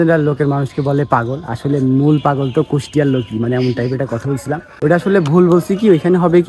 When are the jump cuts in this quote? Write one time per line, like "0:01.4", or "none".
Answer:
none